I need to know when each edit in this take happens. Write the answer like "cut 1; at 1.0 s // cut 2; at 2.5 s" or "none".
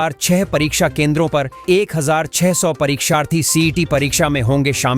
none